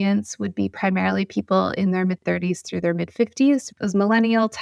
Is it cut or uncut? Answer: cut